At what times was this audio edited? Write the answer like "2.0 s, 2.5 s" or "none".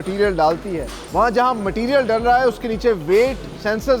1.0 s